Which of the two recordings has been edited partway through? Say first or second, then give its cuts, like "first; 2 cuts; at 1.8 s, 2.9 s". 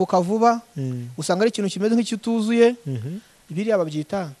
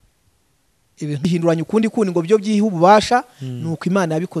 second; 1 cut; at 1.2 s